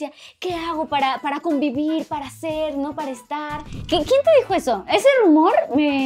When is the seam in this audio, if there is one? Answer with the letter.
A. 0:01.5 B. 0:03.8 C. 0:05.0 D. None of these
B